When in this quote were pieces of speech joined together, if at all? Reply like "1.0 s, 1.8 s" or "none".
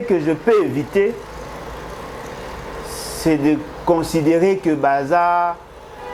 none

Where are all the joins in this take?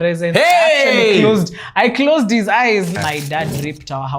3.0 s

